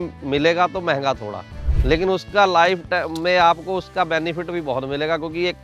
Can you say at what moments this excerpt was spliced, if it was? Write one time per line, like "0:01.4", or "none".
none

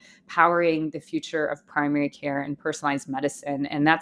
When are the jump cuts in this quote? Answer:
none

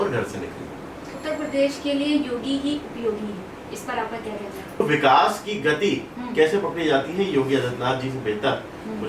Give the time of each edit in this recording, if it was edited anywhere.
0:01.1
0:04.8

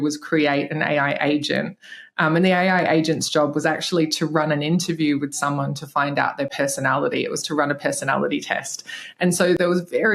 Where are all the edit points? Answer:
none

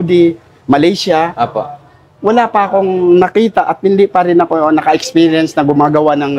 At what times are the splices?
none

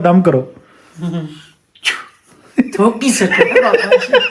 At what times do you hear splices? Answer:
none

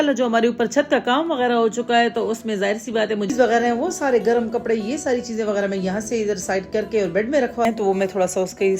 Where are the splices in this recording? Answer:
0:03.3
0:07.6

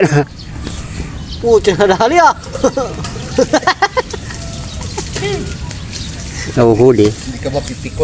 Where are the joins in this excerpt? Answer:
0:06.5

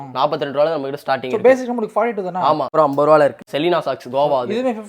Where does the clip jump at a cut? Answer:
0:02.7
0:03.4

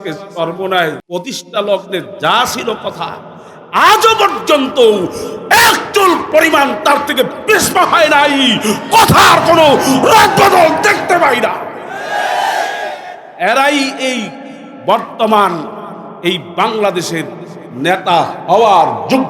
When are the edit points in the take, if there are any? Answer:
0:01.0

